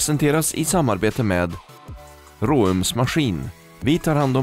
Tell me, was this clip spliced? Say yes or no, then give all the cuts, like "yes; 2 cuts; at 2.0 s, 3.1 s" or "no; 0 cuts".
no; 0 cuts